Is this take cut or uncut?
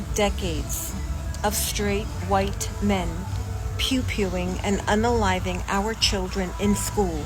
uncut